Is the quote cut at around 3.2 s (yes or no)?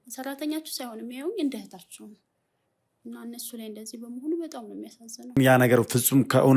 no